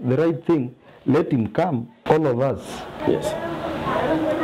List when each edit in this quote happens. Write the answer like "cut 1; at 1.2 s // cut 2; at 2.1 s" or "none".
cut 1; at 2.0 s